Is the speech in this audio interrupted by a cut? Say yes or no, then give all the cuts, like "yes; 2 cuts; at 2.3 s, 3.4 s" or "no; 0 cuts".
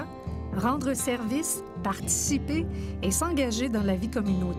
no; 0 cuts